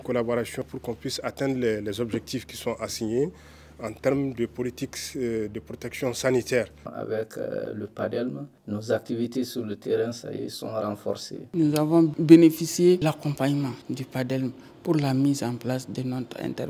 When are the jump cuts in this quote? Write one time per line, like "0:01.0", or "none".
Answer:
0:06.8
0:11.4